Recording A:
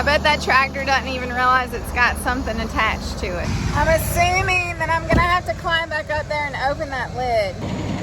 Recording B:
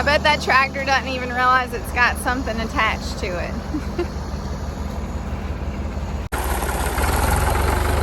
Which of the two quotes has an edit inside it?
A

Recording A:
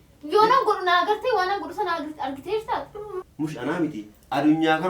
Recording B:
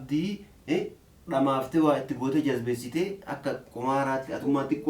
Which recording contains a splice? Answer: A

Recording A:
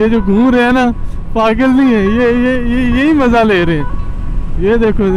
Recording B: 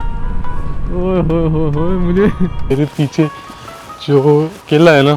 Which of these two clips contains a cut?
B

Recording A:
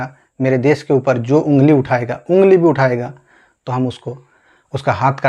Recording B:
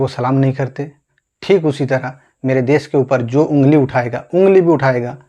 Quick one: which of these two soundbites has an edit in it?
B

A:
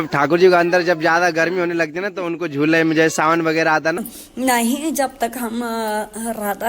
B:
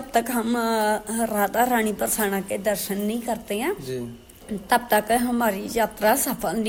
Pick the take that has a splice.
A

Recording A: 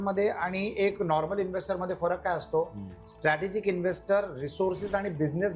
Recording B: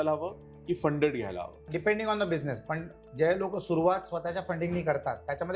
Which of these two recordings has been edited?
B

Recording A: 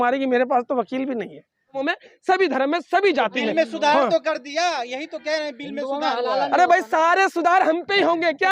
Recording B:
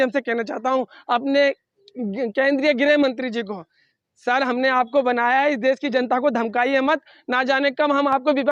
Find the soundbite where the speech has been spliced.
A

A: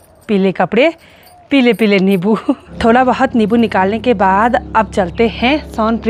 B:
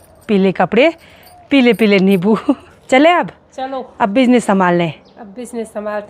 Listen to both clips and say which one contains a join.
B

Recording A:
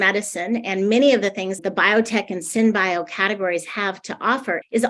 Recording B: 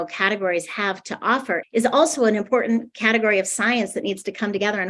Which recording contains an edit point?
A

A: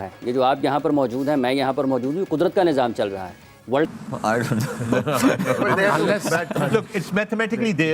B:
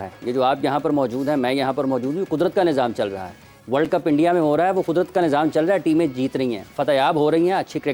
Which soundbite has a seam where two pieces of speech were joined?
A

